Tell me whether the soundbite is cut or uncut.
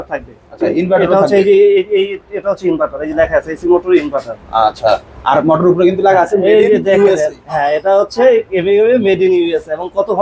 uncut